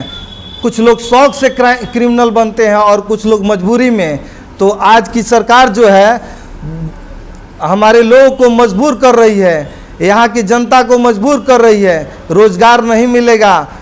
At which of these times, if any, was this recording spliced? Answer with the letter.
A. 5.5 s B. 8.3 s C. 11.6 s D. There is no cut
D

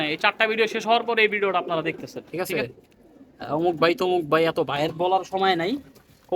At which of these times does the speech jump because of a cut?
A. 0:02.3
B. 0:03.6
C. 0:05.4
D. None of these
A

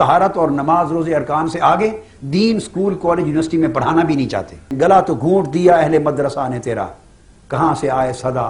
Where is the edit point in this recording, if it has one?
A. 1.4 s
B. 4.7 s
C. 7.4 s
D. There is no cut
B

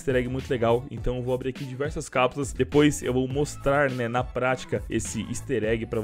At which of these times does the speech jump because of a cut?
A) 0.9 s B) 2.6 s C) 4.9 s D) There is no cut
C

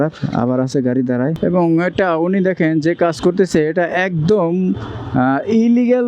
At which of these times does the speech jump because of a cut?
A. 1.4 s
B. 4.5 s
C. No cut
A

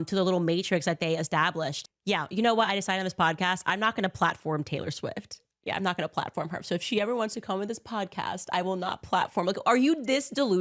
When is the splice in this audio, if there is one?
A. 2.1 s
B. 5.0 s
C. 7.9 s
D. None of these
A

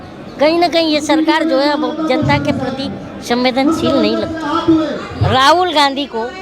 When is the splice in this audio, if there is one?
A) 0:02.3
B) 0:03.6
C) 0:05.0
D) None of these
C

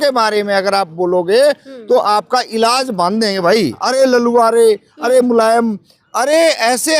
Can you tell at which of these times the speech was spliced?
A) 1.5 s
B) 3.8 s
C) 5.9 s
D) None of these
B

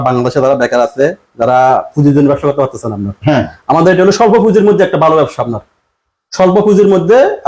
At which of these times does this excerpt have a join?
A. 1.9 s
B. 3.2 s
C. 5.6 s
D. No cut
D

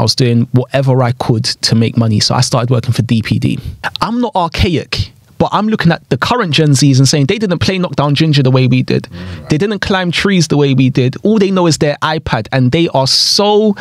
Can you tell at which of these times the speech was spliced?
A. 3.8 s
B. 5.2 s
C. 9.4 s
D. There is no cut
A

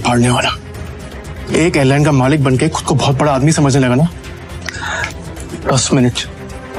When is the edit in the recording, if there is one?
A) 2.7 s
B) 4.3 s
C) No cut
C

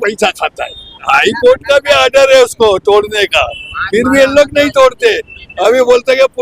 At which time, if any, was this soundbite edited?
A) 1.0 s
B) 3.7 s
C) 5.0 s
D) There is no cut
A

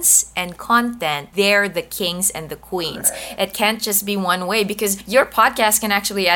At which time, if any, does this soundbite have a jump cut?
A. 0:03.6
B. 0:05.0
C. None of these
B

